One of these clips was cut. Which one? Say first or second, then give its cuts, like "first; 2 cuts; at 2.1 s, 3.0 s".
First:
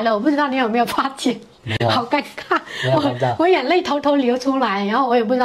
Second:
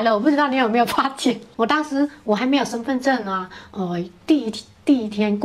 second; 1 cut; at 1.5 s